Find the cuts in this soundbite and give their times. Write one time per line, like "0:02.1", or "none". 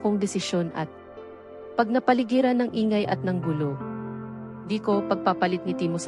0:01.6